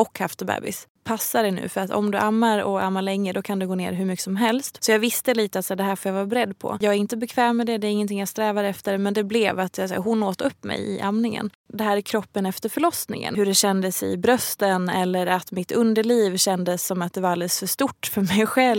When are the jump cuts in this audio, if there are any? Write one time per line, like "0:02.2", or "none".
0:00.9
0:04.7
0:06.8
0:11.5
0:13.3